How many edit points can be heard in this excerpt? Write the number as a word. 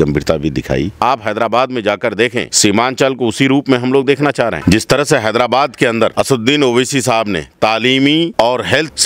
one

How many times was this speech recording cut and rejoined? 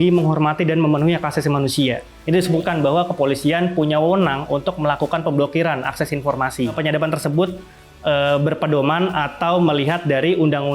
two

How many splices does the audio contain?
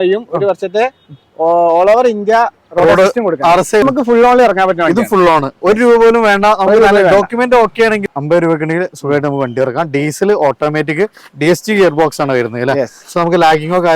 two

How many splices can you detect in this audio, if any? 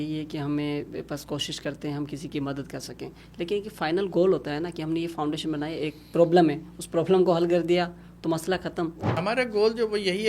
one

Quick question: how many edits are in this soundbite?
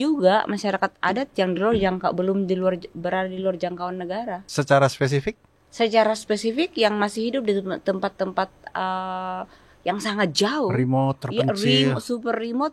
one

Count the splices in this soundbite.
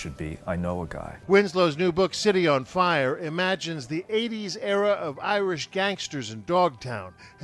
one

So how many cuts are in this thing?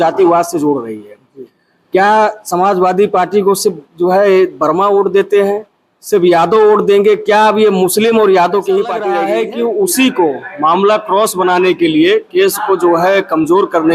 one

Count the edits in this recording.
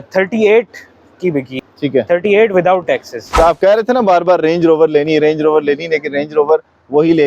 one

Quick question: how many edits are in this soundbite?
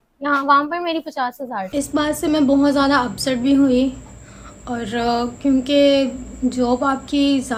zero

